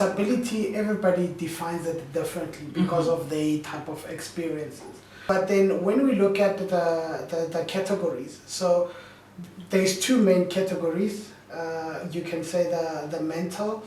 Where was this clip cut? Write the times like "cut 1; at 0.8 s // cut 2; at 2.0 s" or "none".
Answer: cut 1; at 5.1 s